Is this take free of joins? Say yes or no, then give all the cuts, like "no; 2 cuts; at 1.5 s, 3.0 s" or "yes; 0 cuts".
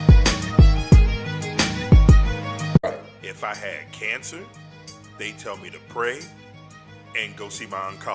no; 1 cut; at 2.8 s